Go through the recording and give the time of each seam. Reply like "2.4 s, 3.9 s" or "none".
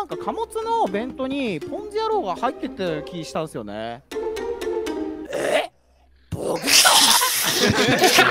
none